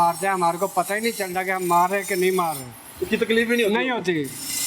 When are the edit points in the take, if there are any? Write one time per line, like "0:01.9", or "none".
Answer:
none